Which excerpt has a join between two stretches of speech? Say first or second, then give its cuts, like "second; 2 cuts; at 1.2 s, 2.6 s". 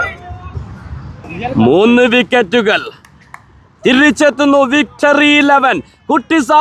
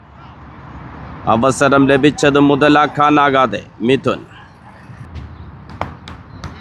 second; 1 cut; at 5.0 s